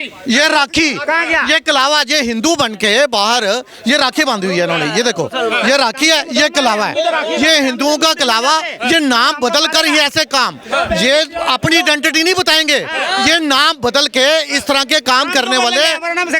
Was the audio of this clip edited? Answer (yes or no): no